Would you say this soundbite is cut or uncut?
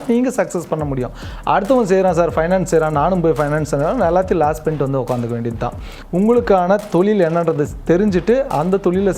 cut